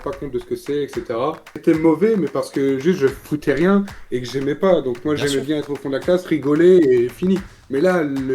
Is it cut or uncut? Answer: cut